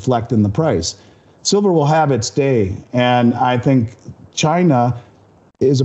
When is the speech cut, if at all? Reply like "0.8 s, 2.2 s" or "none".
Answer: none